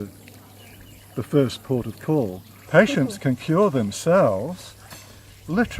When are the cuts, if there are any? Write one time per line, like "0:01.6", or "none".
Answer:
0:02.6